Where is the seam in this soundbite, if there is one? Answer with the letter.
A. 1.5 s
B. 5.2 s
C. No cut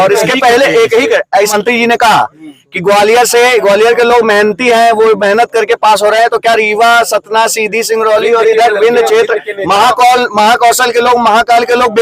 A